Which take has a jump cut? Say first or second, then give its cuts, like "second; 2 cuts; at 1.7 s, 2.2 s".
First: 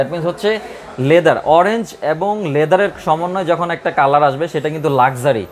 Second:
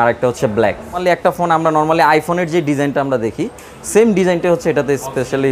second; 1 cut; at 1.0 s